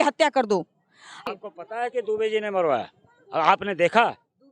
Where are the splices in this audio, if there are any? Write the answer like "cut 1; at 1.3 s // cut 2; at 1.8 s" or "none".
cut 1; at 1.3 s